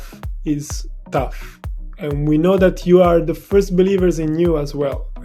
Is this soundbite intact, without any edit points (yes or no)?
yes